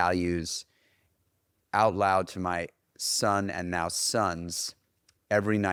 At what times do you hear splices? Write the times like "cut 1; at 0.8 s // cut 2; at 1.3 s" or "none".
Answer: none